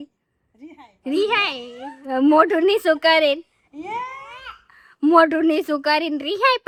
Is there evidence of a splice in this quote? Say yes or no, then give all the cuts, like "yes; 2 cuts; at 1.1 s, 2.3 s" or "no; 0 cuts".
no; 0 cuts